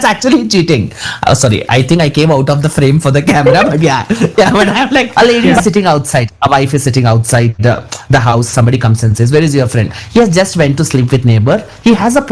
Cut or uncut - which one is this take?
cut